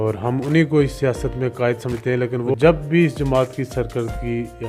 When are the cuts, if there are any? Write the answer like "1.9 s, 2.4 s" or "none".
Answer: 2.5 s